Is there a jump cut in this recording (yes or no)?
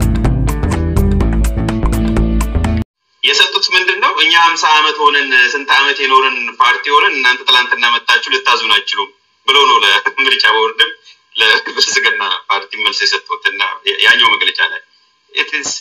yes